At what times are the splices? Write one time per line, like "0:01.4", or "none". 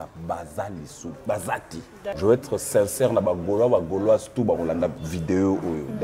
0:02.0